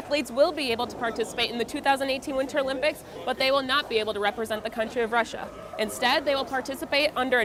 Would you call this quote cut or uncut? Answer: uncut